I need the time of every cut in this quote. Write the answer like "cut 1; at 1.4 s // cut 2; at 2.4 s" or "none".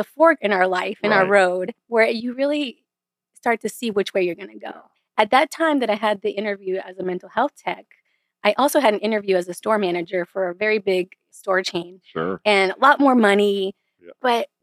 cut 1; at 1.8 s